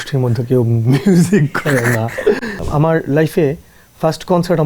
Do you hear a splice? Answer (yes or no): yes